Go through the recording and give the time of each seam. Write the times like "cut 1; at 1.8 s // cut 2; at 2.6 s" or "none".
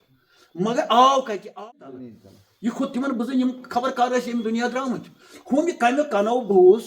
cut 1; at 1.6 s